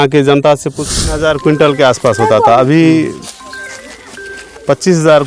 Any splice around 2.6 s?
no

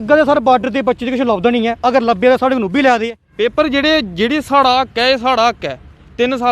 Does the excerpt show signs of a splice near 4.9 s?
no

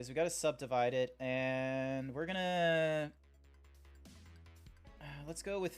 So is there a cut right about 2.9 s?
no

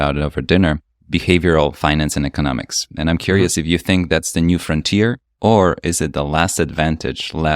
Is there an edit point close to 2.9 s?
no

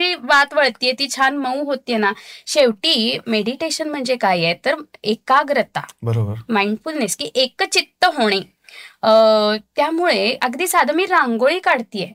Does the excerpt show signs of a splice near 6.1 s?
no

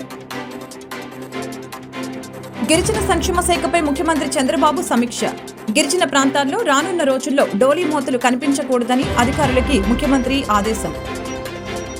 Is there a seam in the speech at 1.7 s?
yes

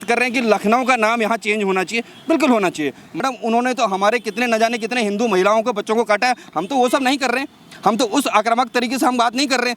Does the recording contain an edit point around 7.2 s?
no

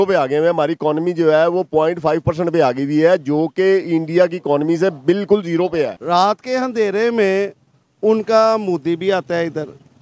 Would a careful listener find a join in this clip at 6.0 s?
yes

